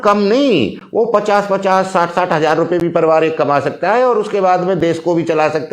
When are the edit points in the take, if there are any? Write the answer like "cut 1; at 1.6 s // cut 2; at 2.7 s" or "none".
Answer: none